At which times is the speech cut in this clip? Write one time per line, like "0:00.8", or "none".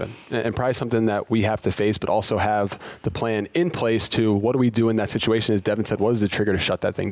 none